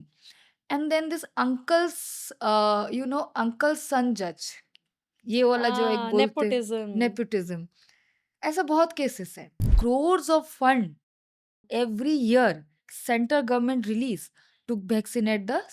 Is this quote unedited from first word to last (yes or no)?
no